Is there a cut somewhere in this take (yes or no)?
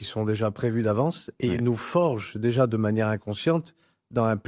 no